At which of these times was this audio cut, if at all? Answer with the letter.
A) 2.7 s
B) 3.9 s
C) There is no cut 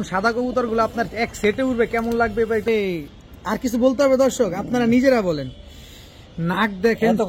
A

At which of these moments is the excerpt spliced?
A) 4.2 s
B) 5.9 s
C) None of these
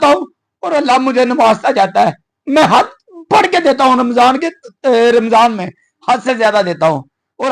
C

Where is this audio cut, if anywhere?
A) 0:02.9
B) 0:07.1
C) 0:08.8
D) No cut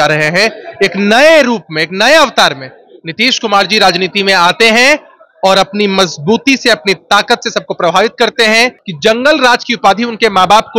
C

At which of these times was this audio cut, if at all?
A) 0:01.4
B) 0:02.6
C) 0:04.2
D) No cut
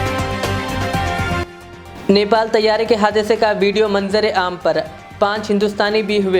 A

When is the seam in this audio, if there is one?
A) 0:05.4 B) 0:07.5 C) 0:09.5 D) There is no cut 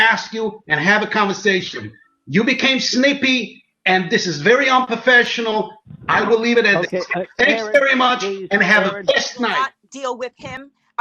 C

